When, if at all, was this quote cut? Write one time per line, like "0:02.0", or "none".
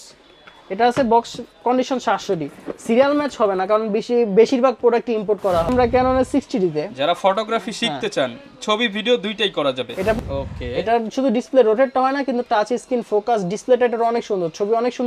0:05.7
0:10.2